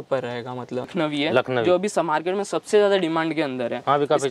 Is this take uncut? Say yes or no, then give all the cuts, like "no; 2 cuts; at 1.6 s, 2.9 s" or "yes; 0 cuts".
no; 1 cut; at 0.9 s